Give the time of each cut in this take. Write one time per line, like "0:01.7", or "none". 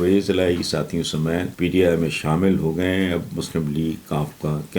0:01.5